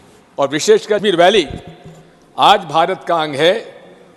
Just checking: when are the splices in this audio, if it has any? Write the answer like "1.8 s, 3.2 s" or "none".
1.0 s